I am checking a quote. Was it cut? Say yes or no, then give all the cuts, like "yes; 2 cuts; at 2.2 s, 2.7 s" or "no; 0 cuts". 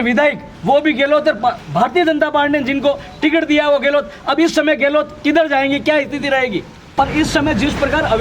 yes; 1 cut; at 6.9 s